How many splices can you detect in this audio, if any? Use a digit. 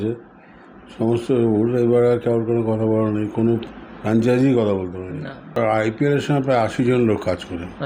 1